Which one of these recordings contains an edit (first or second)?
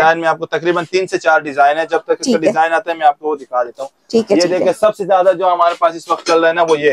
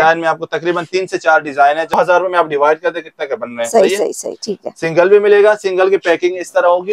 second